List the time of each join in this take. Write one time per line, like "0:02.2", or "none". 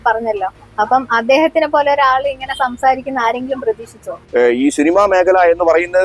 0:04.2